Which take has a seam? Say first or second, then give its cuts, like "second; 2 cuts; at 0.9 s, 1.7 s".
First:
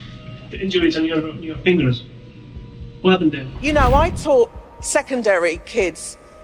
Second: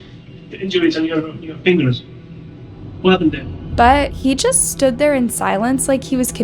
first; 1 cut; at 3.5 s